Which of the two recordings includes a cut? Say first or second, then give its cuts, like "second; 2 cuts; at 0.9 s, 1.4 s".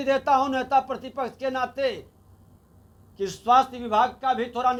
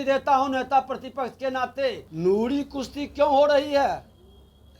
second; 1 cut; at 2.1 s